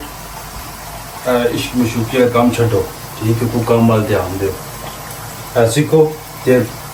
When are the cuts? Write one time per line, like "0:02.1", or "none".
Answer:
none